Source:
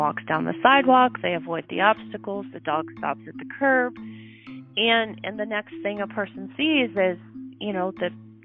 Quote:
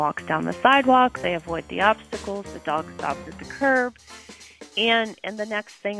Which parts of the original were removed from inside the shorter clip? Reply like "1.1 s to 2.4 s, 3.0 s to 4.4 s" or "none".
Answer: none